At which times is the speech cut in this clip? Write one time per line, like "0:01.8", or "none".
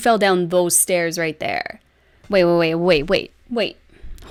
none